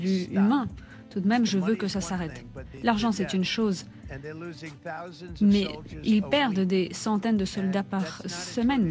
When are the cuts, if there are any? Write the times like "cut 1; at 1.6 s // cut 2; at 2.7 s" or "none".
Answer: none